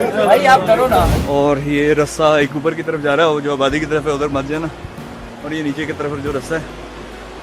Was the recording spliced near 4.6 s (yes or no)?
no